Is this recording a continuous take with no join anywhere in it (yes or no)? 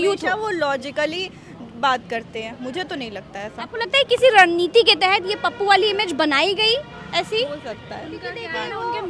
yes